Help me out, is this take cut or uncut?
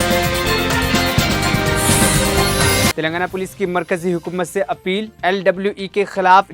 cut